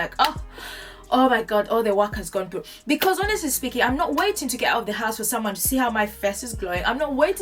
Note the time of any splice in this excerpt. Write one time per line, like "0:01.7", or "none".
none